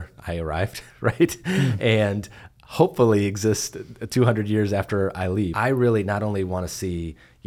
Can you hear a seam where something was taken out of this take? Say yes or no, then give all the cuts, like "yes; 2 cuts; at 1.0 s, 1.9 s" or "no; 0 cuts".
yes; 1 cut; at 5.5 s